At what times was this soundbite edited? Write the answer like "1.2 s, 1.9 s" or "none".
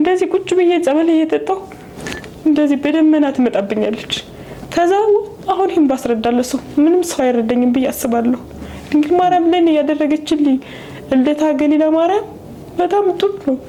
none